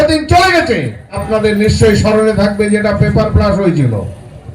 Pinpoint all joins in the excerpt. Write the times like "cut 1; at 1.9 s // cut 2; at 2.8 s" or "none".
cut 1; at 1.2 s